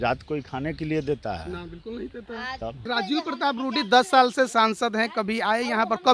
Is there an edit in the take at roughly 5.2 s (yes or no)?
no